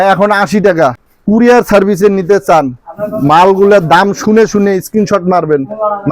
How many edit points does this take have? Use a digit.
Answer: 1